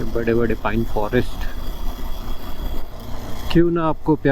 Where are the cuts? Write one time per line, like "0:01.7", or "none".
0:02.9